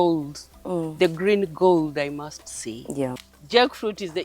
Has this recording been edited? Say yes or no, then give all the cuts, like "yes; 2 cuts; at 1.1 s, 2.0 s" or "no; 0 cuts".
yes; 1 cut; at 3.3 s